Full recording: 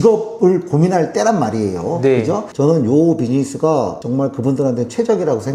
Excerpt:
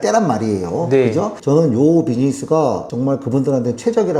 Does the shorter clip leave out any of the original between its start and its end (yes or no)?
no